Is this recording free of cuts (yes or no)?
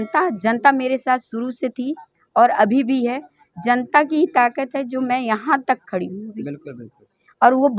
yes